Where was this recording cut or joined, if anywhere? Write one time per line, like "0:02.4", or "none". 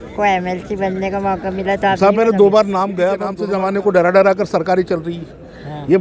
0:03.4